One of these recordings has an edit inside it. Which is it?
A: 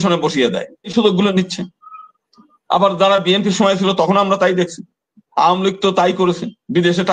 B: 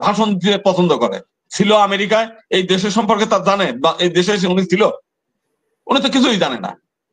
A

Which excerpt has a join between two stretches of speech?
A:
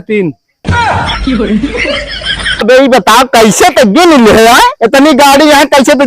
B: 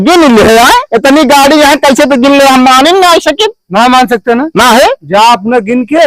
A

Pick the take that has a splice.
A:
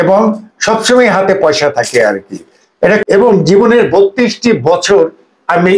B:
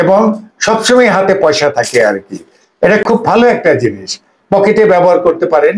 A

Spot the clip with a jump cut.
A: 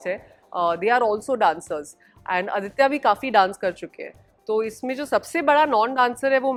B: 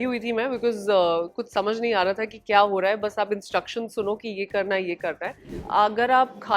B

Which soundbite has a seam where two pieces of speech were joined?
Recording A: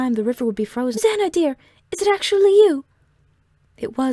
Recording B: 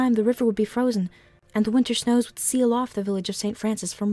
B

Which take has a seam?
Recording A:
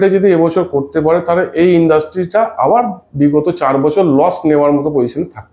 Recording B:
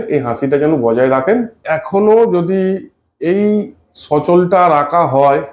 B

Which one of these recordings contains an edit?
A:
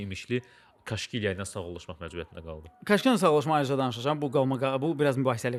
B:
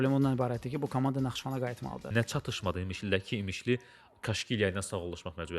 B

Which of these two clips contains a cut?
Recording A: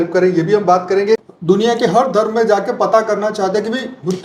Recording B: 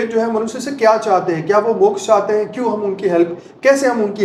A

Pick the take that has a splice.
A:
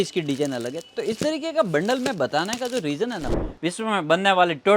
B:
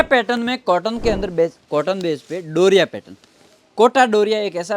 A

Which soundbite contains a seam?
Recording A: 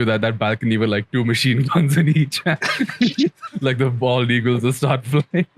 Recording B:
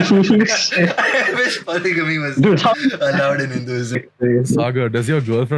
B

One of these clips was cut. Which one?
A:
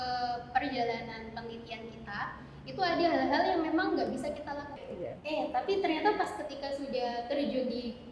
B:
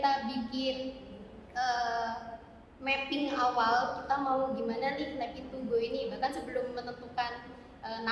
A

